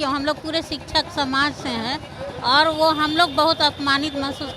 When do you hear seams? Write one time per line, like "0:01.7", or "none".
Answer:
none